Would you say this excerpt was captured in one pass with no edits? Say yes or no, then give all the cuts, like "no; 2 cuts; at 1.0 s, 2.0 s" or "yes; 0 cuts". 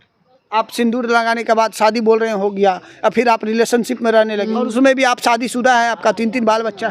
no; 1 cut; at 4.4 s